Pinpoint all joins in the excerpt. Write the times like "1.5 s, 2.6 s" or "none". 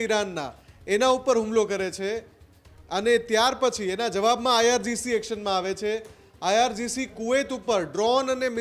none